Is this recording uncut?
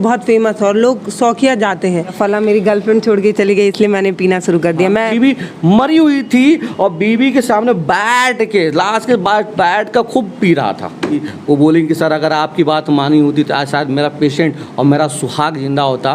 no; 3 cuts; at 2.1 s, 5.1 s, 11.2 s

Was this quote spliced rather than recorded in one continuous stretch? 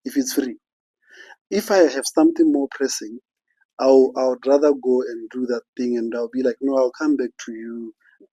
no; 0 cuts

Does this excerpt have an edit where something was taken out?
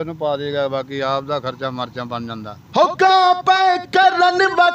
yes; 1 cut; at 2.6 s

